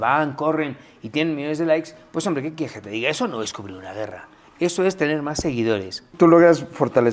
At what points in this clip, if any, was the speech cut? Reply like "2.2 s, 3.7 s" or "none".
6.1 s